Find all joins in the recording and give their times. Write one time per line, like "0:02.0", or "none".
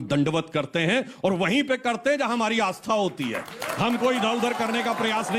none